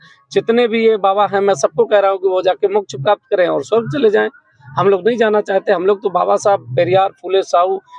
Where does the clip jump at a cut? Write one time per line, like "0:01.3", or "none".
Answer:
none